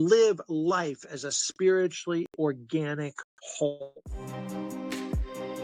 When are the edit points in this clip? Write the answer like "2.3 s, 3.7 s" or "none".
3.8 s